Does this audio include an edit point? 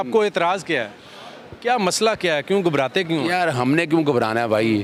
no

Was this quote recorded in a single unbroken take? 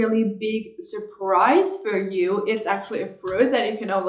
yes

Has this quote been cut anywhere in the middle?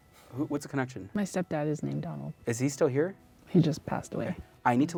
no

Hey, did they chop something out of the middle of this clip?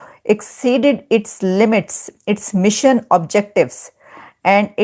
no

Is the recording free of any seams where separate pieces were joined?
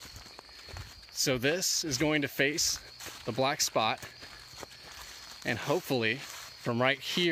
yes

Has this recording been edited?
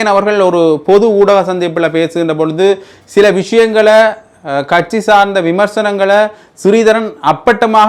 no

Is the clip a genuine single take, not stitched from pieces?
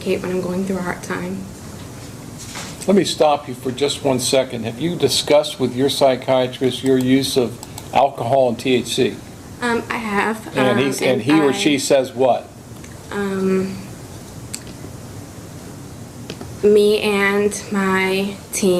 yes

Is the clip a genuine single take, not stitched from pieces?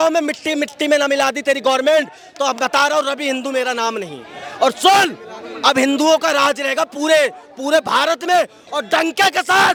yes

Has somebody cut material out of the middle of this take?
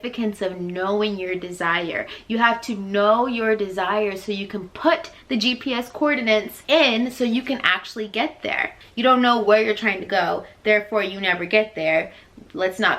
yes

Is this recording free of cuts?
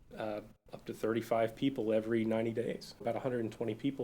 no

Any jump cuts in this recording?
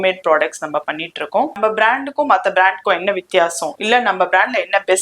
yes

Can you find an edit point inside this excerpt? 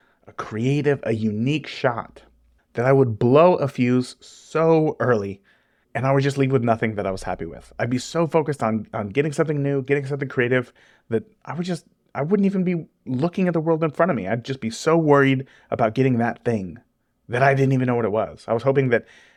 no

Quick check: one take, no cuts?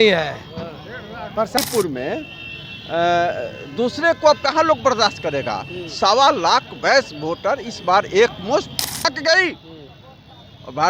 no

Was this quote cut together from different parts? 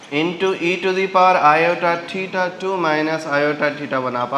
no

